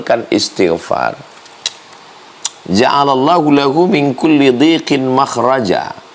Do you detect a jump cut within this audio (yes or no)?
no